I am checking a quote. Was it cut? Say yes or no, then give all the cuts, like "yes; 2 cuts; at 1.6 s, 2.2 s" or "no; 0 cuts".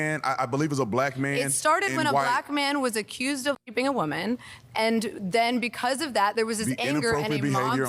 yes; 1 cut; at 3.6 s